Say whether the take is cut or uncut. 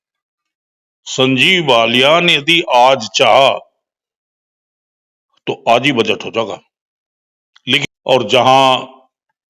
cut